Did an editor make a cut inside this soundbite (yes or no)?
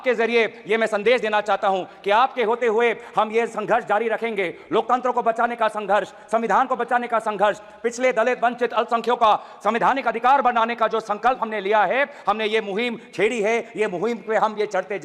no